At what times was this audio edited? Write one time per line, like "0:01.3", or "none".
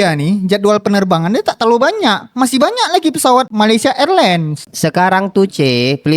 0:03.5
0:04.7